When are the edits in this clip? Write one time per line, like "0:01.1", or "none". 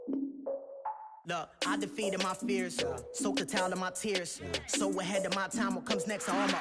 0:01.1